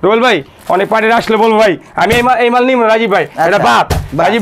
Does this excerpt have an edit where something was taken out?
no; 0 cuts

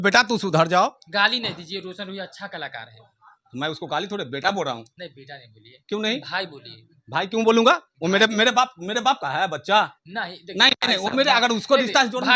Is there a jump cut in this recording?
no; 0 cuts

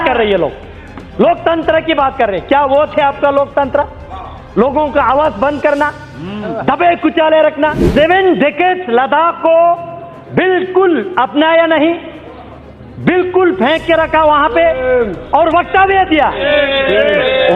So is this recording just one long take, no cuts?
no; 1 cut; at 7.8 s

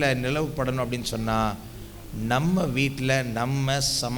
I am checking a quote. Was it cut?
no; 0 cuts

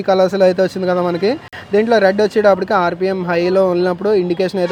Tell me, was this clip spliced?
no; 0 cuts

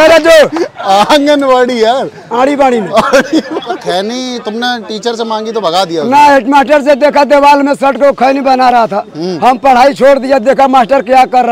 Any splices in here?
yes; 1 cut; at 3.7 s

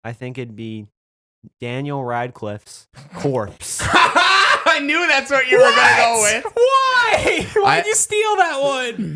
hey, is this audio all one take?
yes; 0 cuts

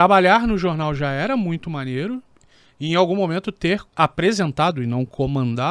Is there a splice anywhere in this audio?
yes; 1 cut; at 3.9 s

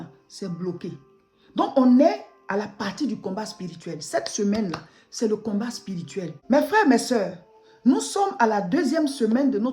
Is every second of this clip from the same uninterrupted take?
no; 1 cut; at 6.3 s

